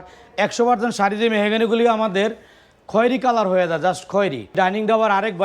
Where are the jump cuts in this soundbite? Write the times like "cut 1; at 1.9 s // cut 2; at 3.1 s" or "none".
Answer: cut 1; at 4.5 s